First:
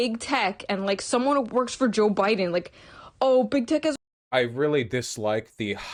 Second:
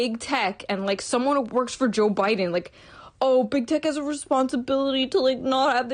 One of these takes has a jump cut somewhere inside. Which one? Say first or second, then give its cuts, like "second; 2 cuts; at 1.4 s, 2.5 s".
second; 1 cut; at 4.0 s